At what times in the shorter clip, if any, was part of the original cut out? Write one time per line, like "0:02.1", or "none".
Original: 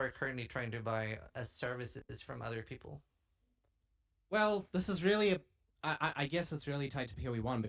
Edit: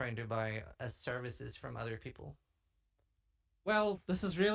0:01.4